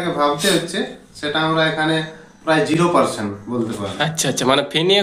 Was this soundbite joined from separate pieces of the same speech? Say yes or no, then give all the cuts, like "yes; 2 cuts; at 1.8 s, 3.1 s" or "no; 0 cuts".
no; 0 cuts